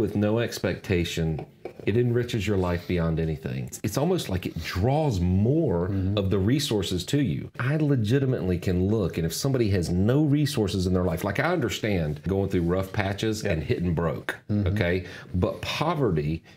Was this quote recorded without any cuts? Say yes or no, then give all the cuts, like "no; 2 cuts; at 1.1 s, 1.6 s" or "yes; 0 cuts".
no; 3 cuts; at 3.8 s, 7.6 s, 12.3 s